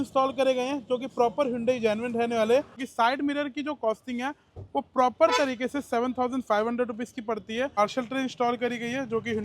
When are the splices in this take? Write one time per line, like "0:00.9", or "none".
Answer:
0:02.8
0:07.8